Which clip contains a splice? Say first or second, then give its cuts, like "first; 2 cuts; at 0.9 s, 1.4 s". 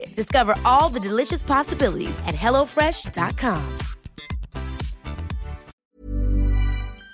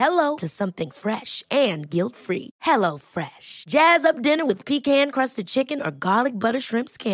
first; 1 cut; at 5.8 s